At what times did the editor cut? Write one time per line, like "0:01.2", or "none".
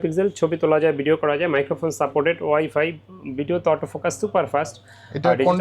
none